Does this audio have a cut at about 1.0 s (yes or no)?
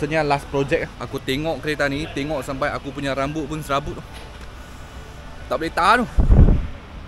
yes